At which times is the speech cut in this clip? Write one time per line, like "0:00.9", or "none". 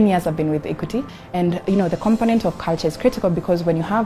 0:01.0